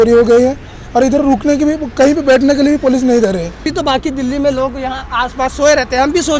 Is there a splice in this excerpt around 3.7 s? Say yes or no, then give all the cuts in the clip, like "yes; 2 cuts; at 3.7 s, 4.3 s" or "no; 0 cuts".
yes; 1 cut; at 3.7 s